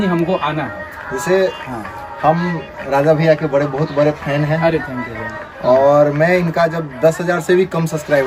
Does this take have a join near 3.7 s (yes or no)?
no